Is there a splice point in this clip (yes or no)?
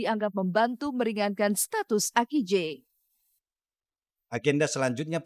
no